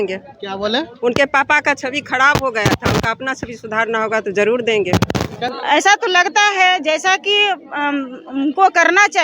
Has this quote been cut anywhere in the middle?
yes; 1 cut; at 5.5 s

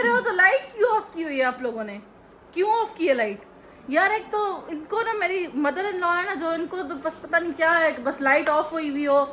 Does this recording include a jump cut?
no; 0 cuts

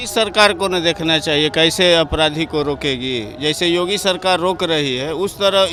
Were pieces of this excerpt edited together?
no; 0 cuts

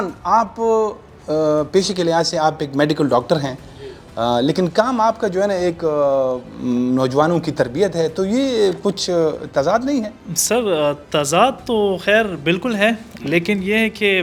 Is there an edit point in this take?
no; 0 cuts

